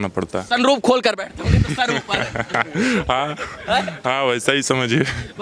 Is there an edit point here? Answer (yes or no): no